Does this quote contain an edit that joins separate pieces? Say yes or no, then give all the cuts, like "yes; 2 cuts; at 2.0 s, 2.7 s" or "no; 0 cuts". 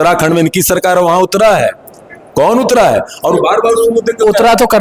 no; 0 cuts